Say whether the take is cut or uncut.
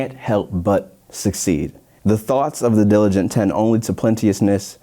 cut